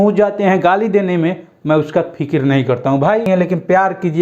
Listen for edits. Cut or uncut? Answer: cut